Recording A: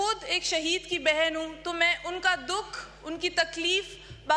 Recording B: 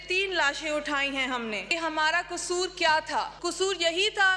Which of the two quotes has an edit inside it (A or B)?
B